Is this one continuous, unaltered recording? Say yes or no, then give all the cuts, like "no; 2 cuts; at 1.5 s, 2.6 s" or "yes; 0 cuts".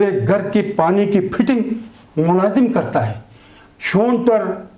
yes; 0 cuts